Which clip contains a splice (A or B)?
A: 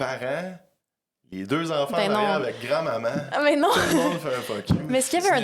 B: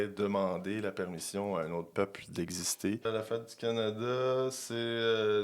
B